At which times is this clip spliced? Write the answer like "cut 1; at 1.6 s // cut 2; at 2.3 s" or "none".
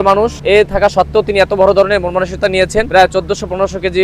cut 1; at 2.9 s